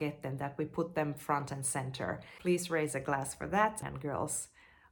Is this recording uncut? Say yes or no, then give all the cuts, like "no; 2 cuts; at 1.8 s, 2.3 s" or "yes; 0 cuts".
no; 2 cuts; at 2.3 s, 3.8 s